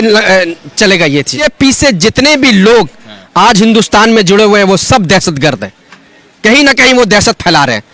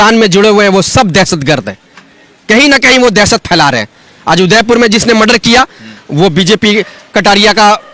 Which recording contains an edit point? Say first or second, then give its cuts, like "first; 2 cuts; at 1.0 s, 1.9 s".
first; 1 cut; at 1.4 s